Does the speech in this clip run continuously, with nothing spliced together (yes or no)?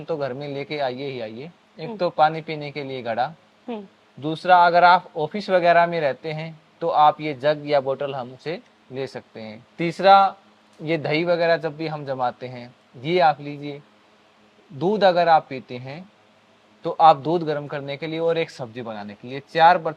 yes